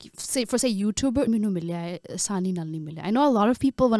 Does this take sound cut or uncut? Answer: cut